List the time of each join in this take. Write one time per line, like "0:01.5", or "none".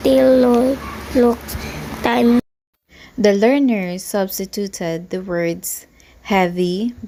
none